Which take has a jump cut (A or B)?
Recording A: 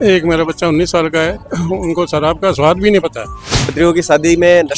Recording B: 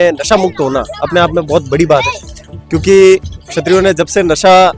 A